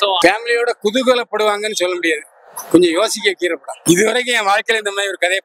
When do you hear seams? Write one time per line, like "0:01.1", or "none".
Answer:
0:03.7